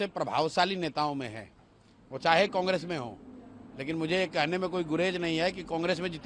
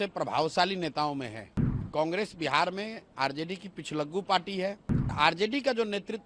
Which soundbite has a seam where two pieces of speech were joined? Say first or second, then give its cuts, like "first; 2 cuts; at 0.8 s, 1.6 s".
second; 2 cuts; at 1.9 s, 5.1 s